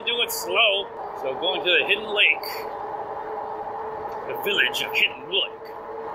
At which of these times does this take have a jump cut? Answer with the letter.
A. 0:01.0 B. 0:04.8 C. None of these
A